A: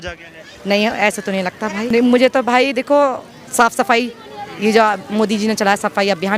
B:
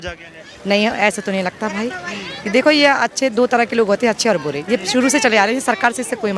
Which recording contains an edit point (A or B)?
A